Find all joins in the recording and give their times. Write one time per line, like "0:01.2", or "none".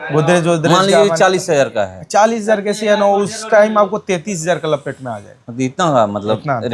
none